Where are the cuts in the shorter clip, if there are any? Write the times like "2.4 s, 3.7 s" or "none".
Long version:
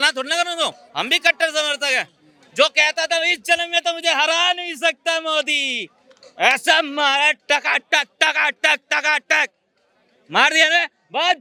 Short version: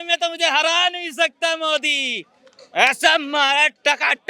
none